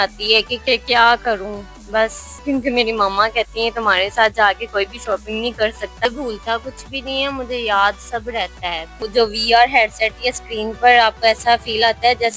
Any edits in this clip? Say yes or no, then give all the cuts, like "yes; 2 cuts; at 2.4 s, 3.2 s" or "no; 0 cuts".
yes; 3 cuts; at 2.3 s, 6.1 s, 9.0 s